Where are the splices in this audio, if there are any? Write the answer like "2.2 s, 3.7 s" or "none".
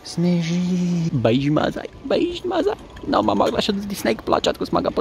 1.1 s